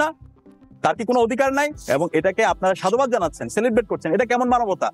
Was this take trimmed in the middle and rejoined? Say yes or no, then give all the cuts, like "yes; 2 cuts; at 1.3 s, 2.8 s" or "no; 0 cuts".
yes; 1 cut; at 1.8 s